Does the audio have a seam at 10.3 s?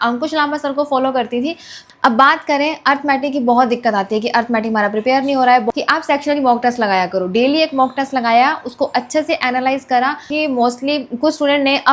yes; 3 cuts; at 1.8 s, 5.7 s, 10.3 s

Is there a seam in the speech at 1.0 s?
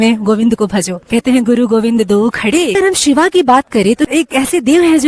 yes; 3 cuts; at 1.0 s, 2.7 s, 4.1 s

